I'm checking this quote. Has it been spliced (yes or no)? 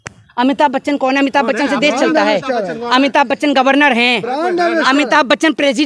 no